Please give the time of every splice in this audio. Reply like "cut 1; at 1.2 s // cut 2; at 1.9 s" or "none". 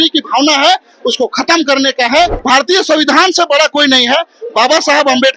cut 1; at 2.4 s